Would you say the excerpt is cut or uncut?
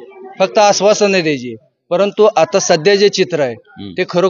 uncut